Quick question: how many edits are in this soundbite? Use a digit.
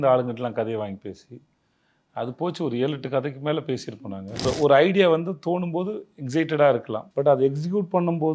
2